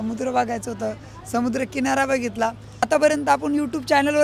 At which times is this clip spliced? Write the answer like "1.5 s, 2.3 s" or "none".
2.9 s